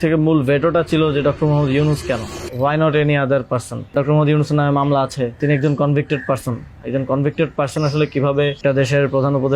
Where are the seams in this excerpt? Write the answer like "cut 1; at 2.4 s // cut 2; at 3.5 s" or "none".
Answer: cut 1; at 2.4 s // cut 2; at 3.9 s // cut 3; at 5.4 s // cut 4; at 8.6 s